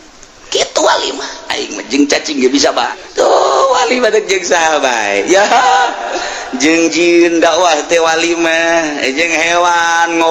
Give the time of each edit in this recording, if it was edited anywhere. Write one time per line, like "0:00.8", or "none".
0:03.0